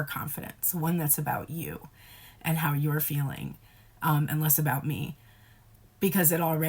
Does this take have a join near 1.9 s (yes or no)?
no